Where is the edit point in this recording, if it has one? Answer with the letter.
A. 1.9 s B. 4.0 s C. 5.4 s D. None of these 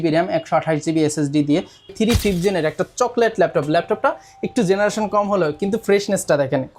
A